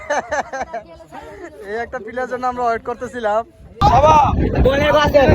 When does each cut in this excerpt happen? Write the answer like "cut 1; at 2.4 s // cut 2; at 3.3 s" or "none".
cut 1; at 3.8 s